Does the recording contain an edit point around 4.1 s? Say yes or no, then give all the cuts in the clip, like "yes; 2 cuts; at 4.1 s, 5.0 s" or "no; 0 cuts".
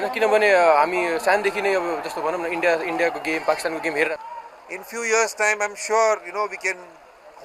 yes; 1 cut; at 4.1 s